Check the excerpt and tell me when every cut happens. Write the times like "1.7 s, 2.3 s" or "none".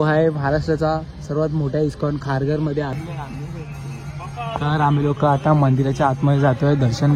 3.0 s

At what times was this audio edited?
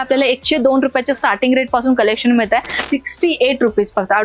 2.8 s

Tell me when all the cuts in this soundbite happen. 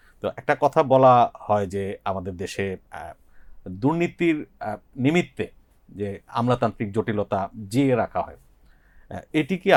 none

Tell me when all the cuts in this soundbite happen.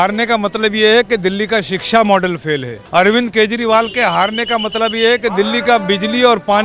2.7 s

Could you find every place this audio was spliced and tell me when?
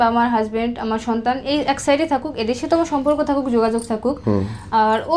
none

